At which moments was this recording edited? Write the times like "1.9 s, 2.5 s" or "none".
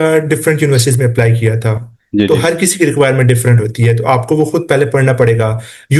none